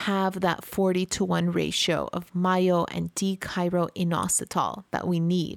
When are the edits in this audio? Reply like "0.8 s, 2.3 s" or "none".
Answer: none

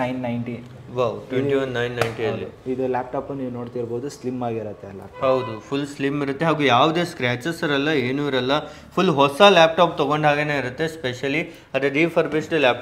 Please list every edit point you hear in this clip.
none

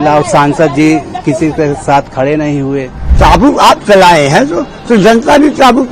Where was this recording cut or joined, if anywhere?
3.0 s

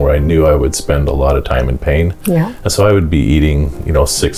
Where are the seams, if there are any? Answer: none

